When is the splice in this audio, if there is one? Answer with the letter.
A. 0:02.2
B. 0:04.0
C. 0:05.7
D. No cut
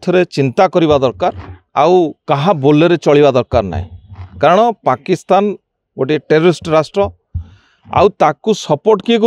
D